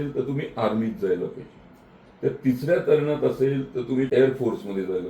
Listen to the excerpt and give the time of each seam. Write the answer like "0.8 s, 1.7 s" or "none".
4.1 s